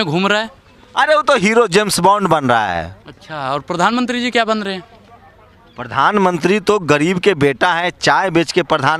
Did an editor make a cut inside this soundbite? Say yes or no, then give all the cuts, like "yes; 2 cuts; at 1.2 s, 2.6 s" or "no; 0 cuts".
no; 0 cuts